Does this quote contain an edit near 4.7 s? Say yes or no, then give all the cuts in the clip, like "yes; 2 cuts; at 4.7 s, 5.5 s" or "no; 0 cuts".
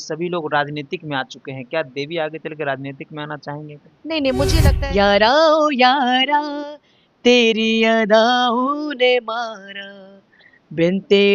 yes; 1 cut; at 4.7 s